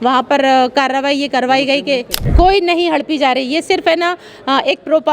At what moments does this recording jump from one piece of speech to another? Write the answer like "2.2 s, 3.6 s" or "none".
2.2 s